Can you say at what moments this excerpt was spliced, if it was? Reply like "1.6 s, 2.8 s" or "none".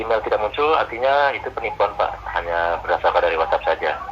none